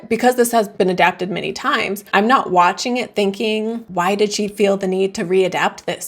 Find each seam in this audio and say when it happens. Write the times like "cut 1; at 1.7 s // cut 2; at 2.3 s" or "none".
none